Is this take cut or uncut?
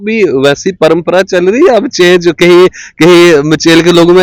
uncut